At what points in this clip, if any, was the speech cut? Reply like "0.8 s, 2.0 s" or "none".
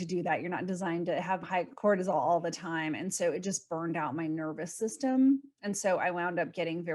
1.4 s